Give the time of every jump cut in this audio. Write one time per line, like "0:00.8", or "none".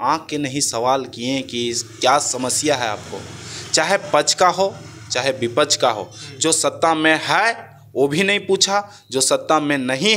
none